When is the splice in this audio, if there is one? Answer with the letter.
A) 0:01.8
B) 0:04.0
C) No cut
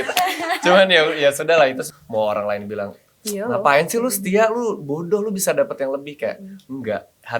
A